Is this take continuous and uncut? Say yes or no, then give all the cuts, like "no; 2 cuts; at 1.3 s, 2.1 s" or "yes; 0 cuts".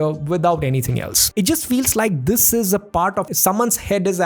no; 2 cuts; at 1.2 s, 3.3 s